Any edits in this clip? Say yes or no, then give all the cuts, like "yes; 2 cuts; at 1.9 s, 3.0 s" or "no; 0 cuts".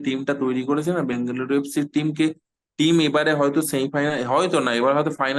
no; 0 cuts